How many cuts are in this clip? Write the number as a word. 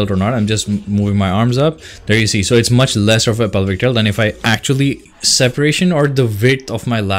one